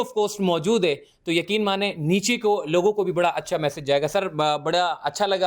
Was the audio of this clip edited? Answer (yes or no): no